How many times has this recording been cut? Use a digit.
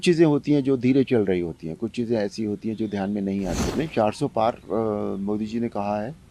1